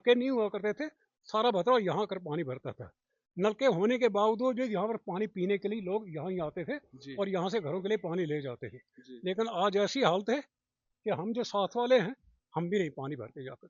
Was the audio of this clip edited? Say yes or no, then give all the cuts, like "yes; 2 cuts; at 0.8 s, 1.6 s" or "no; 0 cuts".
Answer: no; 0 cuts